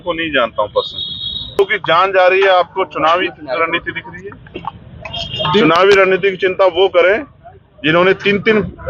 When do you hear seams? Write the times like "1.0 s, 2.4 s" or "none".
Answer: 1.6 s